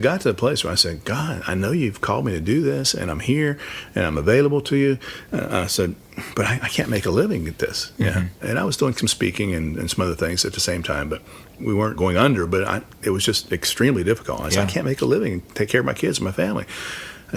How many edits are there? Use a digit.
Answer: 0